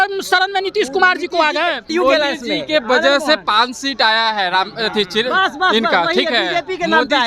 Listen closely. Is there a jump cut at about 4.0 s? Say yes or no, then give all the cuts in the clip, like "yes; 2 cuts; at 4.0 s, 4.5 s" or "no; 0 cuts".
no; 1 cut; at 1.9 s